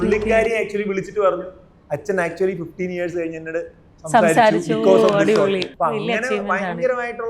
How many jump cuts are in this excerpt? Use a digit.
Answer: 1